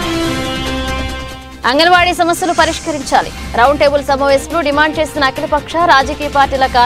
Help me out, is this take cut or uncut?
uncut